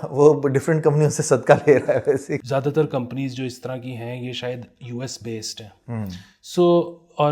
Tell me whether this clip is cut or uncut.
cut